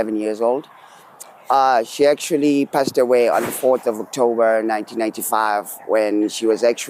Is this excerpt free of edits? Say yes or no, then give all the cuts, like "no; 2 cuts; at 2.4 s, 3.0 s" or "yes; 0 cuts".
yes; 0 cuts